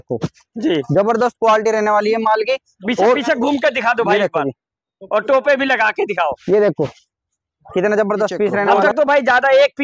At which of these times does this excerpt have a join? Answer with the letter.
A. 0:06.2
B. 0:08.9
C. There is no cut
B